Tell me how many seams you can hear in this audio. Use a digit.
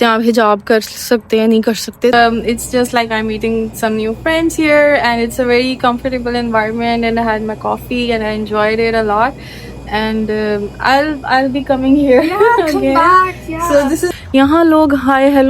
2